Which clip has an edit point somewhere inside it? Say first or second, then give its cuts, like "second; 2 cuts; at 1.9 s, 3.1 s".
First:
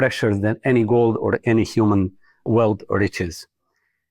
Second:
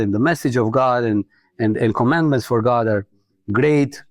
first; 1 cut; at 2.5 s